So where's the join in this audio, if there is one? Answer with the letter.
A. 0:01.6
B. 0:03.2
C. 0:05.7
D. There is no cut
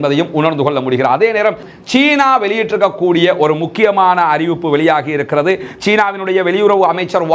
A